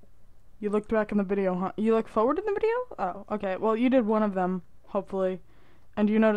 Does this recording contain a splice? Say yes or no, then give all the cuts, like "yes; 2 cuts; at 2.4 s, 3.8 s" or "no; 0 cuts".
no; 0 cuts